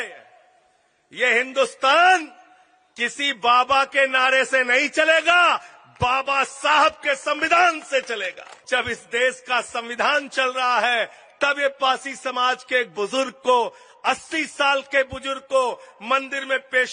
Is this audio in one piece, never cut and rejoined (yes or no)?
no